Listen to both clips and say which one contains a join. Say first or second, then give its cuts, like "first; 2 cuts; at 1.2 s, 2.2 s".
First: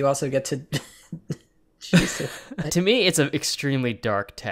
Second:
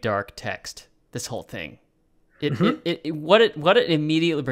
first; 1 cut; at 2.7 s